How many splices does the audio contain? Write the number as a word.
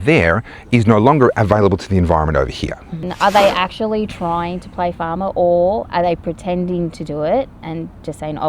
one